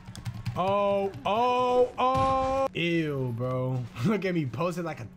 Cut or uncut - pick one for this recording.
cut